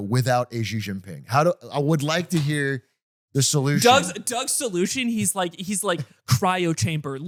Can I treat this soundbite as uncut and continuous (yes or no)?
yes